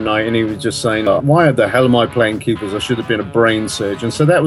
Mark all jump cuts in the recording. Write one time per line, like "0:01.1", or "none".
0:01.1